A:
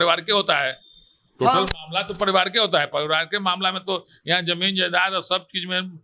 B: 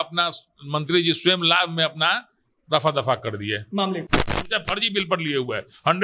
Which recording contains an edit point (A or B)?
B